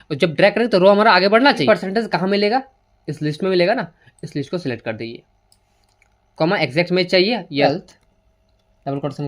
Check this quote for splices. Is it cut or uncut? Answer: cut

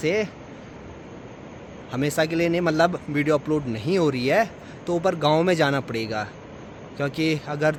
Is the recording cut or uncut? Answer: uncut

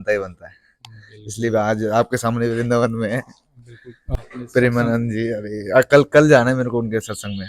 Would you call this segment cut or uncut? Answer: cut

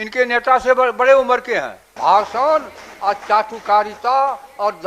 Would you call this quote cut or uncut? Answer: cut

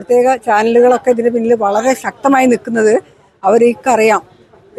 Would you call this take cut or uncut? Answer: uncut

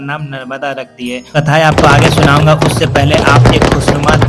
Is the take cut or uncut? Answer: cut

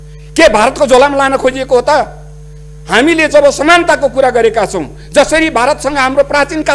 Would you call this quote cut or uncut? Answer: uncut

